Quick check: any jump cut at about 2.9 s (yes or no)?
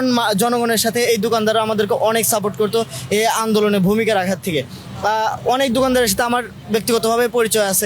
no